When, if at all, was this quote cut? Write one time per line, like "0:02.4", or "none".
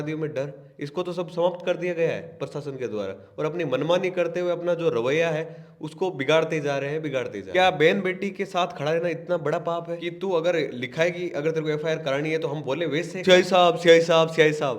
0:07.4
0:10.0
0:13.1